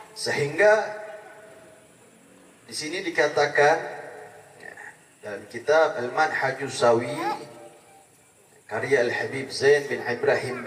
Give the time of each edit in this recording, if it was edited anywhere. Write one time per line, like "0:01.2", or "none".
none